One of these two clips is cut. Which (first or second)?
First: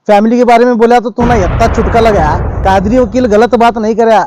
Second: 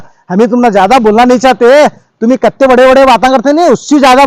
first